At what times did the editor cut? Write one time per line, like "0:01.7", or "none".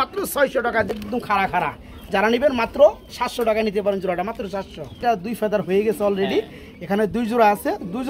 0:01.1
0:05.0